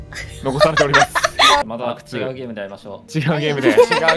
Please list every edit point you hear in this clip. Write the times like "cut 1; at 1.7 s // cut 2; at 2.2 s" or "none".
cut 1; at 1.6 s